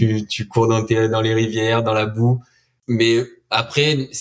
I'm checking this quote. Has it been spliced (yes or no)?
yes